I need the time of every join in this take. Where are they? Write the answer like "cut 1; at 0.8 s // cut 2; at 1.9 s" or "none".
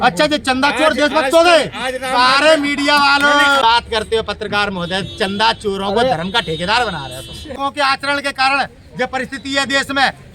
cut 1; at 3.6 s // cut 2; at 7.6 s